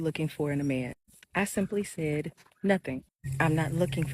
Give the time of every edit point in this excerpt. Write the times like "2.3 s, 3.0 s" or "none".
3.0 s